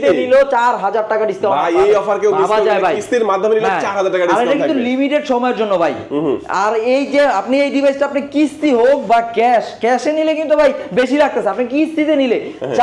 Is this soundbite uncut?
yes; 0 cuts

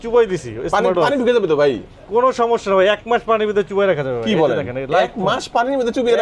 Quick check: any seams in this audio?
no; 0 cuts

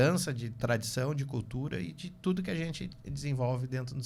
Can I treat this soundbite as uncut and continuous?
yes; 0 cuts

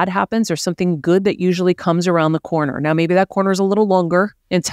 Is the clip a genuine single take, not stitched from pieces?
yes; 0 cuts

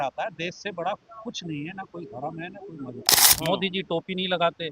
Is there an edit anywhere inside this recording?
yes; 1 cut; at 3.2 s

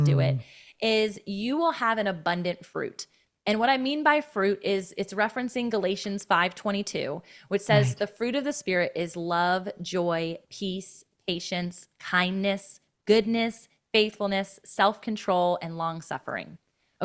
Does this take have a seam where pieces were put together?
no; 0 cuts

